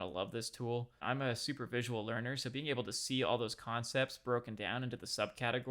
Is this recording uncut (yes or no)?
no